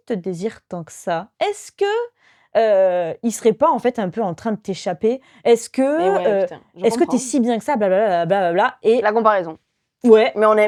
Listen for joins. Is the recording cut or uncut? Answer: uncut